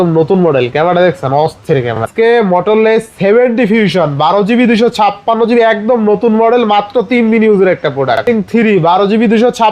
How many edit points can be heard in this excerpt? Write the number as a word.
two